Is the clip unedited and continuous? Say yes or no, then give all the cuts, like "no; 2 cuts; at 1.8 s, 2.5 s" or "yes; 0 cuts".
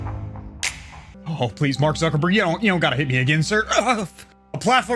no; 1 cut; at 1.0 s